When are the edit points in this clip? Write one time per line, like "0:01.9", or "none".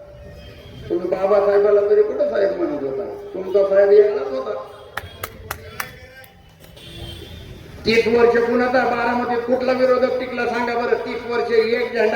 0:06.8